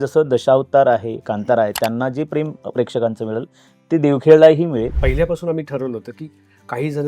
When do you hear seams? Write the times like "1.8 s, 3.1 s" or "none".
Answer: 5.0 s